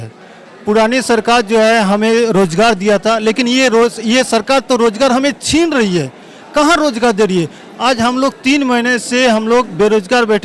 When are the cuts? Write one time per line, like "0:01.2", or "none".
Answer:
none